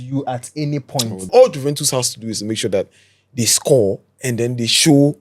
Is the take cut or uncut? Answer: cut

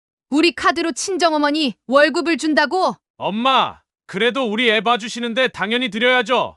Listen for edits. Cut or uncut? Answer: cut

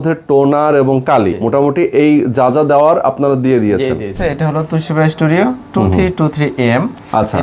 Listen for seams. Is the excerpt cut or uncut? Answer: cut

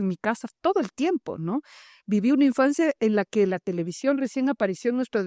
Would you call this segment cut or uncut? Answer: uncut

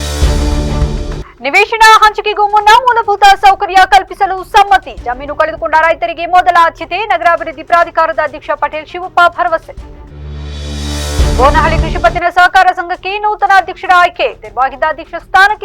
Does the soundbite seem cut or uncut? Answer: cut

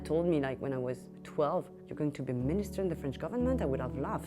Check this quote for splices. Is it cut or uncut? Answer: cut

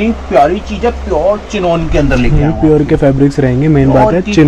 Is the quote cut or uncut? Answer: uncut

